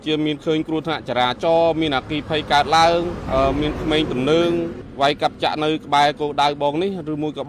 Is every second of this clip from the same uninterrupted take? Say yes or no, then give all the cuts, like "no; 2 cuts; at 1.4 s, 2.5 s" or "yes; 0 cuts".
no; 2 cuts; at 3.2 s, 4.8 s